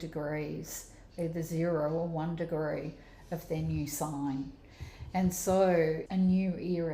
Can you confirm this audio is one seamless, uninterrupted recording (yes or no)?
no